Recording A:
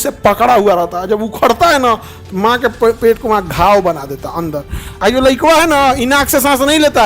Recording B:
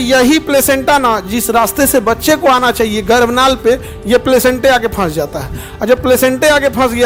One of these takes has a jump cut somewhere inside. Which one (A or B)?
A